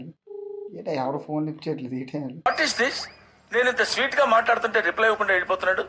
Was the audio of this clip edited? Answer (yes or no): no